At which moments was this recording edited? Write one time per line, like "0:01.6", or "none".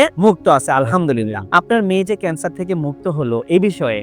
none

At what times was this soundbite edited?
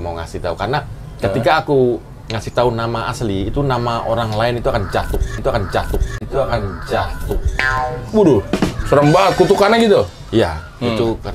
none

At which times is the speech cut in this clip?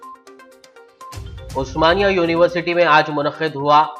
none

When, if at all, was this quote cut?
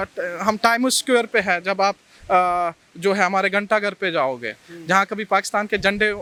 none

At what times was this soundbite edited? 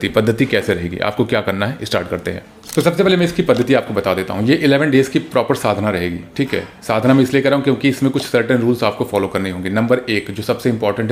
none

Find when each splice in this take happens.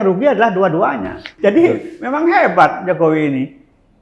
0:01.2

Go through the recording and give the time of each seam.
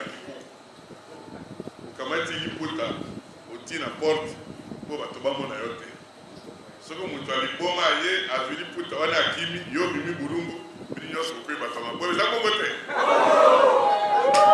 none

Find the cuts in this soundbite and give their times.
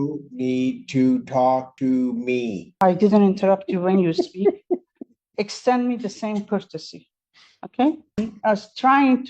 0:02.6
0:08.2

